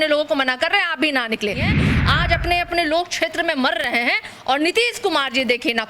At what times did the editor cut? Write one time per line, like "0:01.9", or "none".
0:01.7